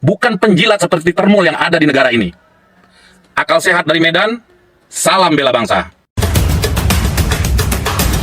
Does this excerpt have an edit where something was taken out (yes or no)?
yes